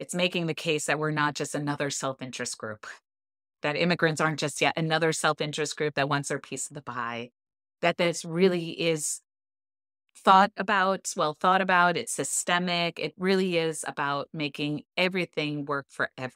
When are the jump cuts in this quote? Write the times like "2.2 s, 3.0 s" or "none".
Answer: 3.6 s